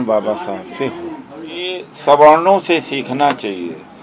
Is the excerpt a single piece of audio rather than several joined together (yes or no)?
no